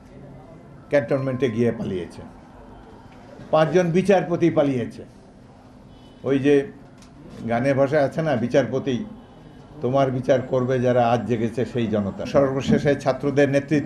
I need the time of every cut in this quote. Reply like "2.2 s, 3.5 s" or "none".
12.3 s